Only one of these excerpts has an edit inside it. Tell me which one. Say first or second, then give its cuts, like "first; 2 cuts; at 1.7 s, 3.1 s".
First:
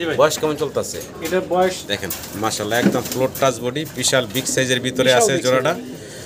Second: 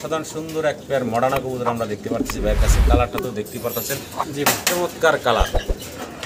first; 1 cut; at 1.8 s